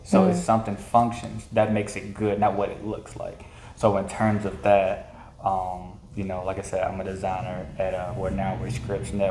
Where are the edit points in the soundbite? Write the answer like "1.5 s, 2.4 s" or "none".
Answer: none